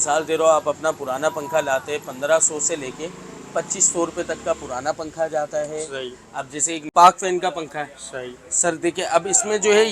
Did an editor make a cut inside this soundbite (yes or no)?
yes